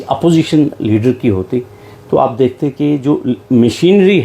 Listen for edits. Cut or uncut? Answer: uncut